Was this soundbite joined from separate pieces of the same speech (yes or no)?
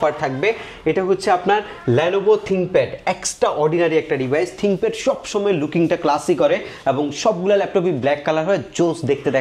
no